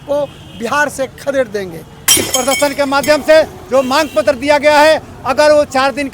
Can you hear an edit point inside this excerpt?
yes; 1 cut; at 2.2 s

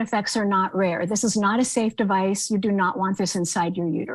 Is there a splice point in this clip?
no; 0 cuts

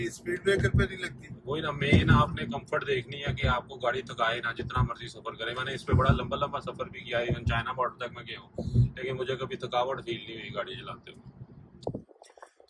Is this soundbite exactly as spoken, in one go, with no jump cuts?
yes; 0 cuts

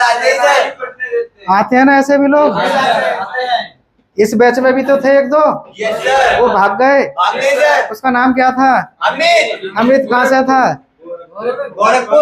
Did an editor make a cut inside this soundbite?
no; 0 cuts

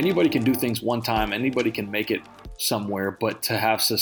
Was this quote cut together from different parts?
no; 0 cuts

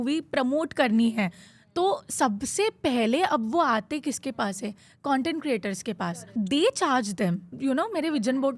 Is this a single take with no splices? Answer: no; 2 cuts; at 6.2 s, 7.5 s

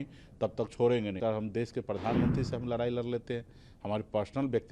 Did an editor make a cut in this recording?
yes; 1 cut; at 1.2 s

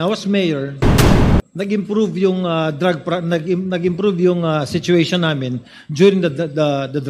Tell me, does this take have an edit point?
no; 0 cuts

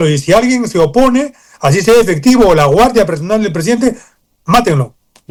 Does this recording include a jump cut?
no; 0 cuts

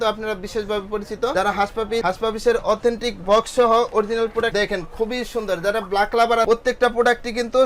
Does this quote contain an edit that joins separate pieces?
no; 0 cuts

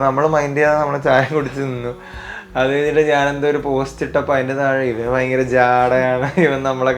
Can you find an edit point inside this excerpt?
no; 0 cuts

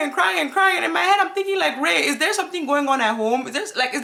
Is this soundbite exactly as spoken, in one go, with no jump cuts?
yes; 0 cuts

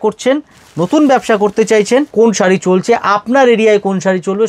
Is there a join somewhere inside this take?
yes; 1 cut; at 2.1 s

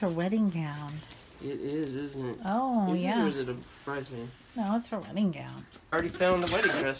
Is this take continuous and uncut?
no; 1 cut; at 5.9 s

